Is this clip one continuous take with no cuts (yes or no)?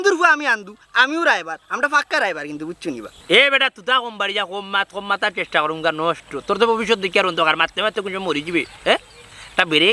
yes